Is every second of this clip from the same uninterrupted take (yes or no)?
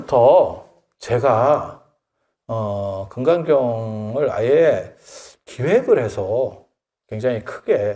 yes